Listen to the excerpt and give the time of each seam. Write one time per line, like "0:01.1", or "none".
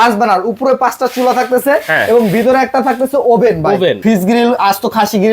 0:04.0